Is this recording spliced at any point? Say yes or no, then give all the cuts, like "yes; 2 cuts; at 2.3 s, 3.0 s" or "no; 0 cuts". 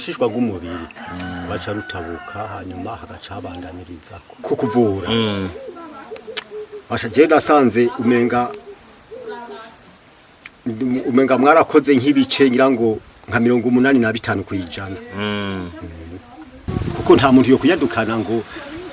yes; 2 cuts; at 4.3 s, 16.7 s